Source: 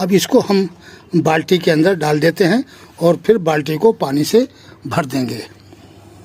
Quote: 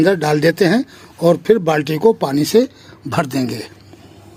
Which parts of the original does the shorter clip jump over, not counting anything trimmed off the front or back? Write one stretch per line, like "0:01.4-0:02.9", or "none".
none